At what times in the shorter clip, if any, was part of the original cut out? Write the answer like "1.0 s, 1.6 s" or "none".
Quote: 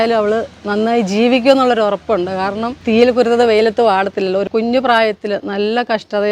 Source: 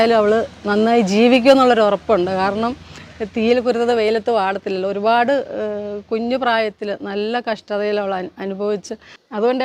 2.8 s, 4.5 s